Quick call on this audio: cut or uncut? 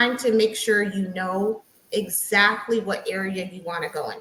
uncut